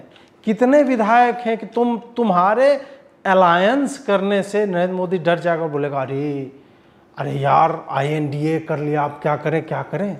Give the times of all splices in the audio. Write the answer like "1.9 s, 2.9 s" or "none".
none